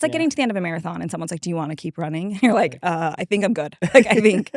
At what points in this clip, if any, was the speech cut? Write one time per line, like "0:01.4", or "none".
none